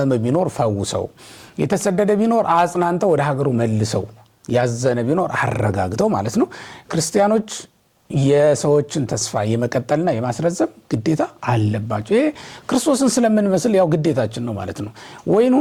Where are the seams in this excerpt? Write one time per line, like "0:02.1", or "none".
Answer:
none